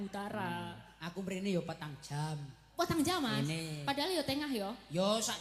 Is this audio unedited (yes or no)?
yes